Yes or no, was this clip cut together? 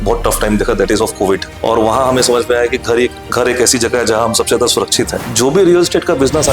yes